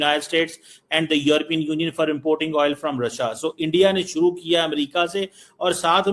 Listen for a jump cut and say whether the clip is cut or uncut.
uncut